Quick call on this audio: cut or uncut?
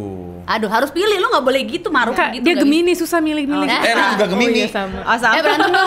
uncut